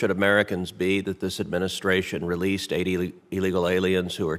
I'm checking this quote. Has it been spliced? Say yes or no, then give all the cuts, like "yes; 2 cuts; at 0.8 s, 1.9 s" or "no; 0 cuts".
no; 0 cuts